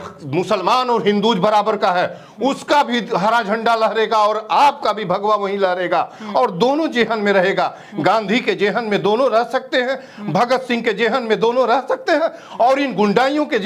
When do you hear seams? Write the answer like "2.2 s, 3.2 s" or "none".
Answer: none

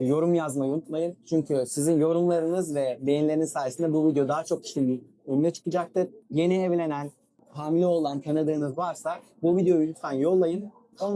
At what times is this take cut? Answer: 7.4 s

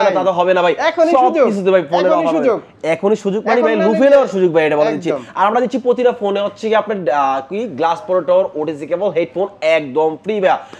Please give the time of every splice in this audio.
none

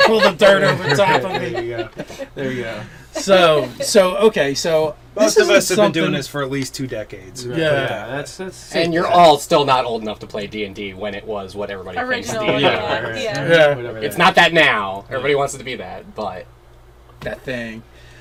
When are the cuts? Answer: none

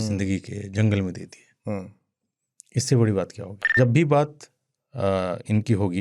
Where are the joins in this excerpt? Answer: 3.7 s

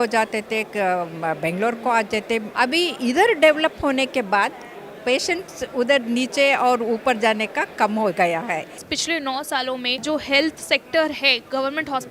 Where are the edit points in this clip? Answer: 2.5 s, 8.9 s, 10.0 s

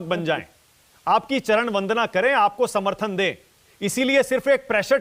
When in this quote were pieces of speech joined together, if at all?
none

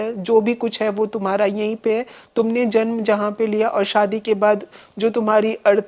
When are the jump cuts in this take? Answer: none

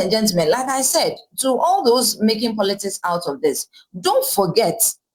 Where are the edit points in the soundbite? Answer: none

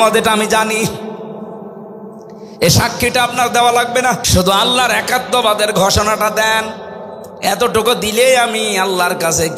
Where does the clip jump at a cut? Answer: 4.2 s

